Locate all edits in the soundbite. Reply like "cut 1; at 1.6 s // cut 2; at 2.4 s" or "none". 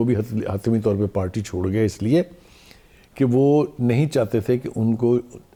none